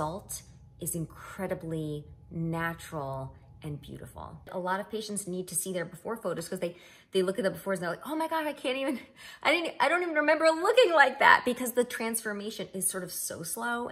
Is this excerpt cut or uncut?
cut